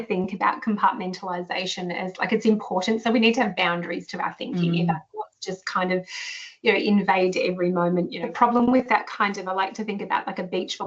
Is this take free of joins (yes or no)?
no